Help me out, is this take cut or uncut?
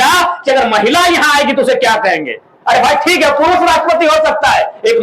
uncut